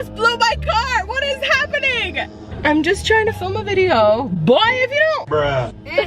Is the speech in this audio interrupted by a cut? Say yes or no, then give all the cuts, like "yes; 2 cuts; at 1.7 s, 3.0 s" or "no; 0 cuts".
yes; 1 cut; at 2.4 s